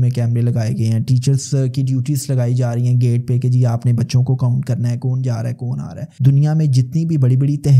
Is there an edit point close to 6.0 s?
yes; 1 cut; at 6.0 s

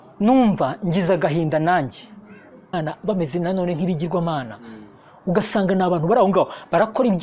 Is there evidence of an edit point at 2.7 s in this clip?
yes; 1 cut; at 2.7 s

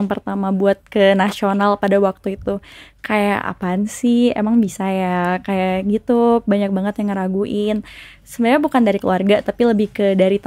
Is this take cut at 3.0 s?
no; 0 cuts

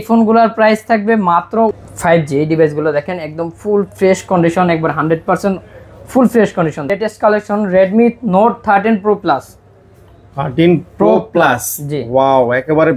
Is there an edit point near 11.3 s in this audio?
no; 2 cuts; at 1.7 s, 6.8 s

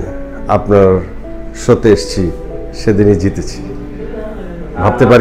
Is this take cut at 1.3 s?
no; 0 cuts

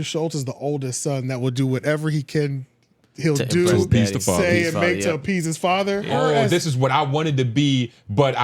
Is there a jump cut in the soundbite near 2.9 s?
no; 1 cut; at 6.1 s

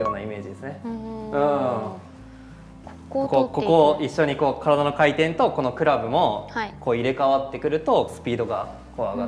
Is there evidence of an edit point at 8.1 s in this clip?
yes; 1 cut; at 8.1 s

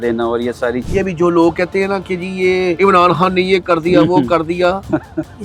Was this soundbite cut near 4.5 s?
no; 2 cuts; at 0.8 s, 2.8 s

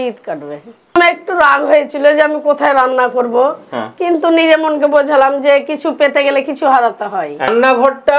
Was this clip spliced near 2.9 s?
no; 2 cuts; at 1.0 s, 7.5 s

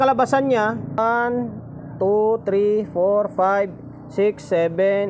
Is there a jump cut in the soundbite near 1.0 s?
yes; 1 cut; at 1.0 s

